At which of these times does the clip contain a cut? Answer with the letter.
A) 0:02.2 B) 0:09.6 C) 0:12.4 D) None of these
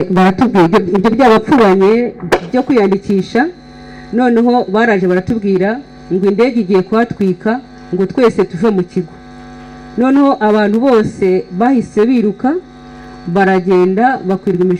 D